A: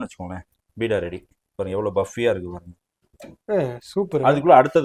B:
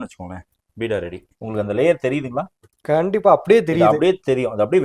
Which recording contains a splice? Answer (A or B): B